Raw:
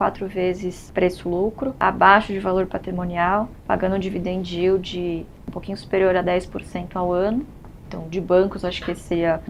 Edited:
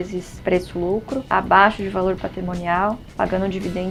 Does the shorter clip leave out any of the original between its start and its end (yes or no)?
no